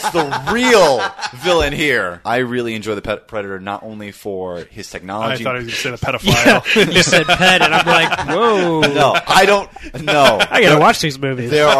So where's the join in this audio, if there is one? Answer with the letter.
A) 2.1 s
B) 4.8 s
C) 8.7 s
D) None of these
A